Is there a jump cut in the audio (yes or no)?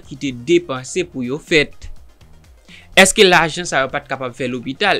no